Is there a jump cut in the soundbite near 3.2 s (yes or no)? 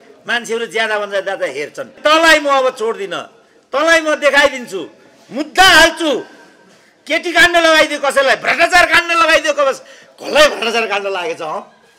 no